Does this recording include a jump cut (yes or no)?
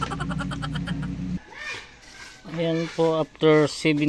yes